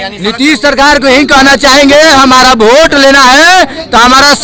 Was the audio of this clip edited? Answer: no; 0 cuts

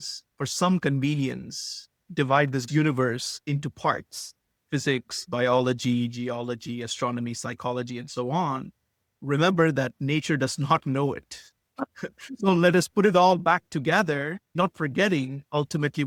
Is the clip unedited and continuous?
yes; 0 cuts

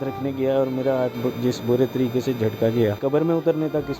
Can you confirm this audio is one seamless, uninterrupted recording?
no; 1 cut; at 3.0 s

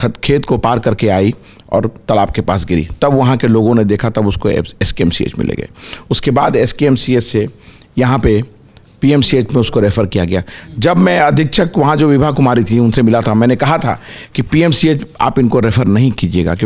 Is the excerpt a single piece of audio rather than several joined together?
yes; 0 cuts

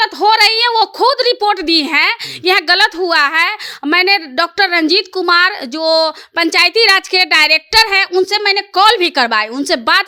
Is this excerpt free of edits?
yes; 0 cuts

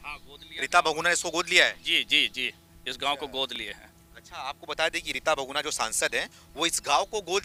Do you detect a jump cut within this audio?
no; 0 cuts

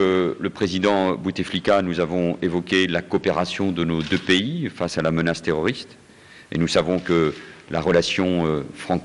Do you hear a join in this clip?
no; 0 cuts

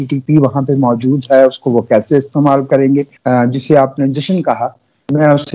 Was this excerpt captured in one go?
no; 1 cut; at 3.1 s

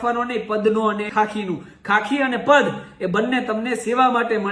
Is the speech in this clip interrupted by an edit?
yes; 1 cut; at 1.1 s

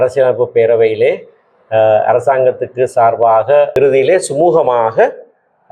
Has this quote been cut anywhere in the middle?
yes; 1 cut; at 3.7 s

